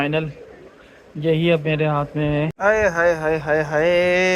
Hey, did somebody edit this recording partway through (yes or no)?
yes